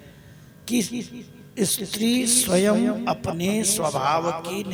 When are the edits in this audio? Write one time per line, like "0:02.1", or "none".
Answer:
none